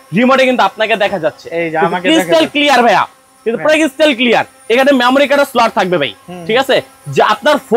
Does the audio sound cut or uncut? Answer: uncut